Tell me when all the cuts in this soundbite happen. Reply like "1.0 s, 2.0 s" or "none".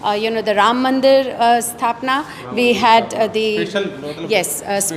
none